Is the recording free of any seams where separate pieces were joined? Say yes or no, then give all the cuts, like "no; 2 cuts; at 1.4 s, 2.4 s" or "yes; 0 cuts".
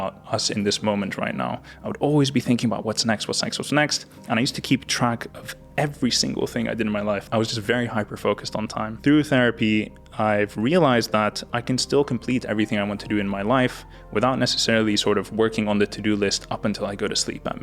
no; 2 cuts; at 7.2 s, 8.9 s